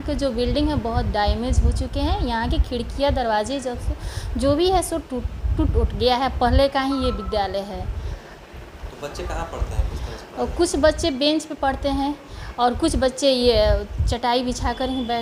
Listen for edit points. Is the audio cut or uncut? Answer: uncut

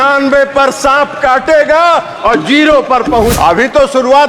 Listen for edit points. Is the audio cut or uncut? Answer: cut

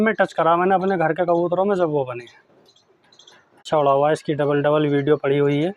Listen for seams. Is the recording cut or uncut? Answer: cut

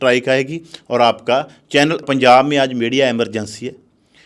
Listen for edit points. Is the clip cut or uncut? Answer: cut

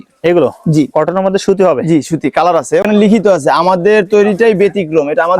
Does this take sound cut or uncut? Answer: cut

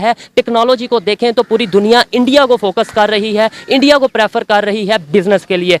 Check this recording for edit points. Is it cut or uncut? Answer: uncut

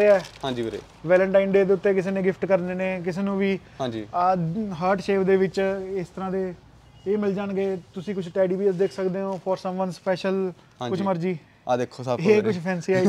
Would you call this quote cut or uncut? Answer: uncut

